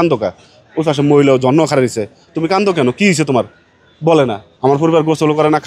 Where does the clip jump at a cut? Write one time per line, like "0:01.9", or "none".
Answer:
0:04.5